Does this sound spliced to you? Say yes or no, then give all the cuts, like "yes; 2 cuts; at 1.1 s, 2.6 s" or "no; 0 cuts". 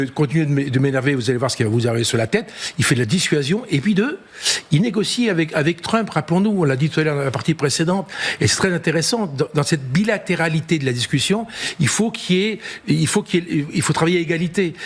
no; 0 cuts